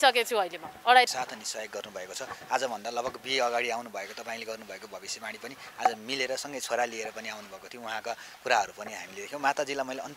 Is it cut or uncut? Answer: cut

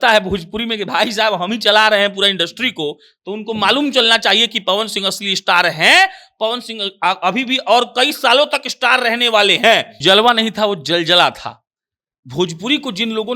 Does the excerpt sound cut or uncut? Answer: cut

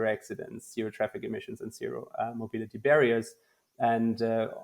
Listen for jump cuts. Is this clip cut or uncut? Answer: uncut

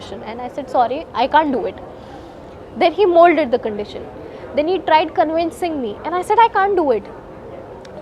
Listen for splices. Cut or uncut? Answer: uncut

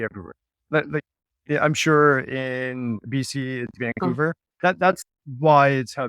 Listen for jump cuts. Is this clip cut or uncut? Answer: cut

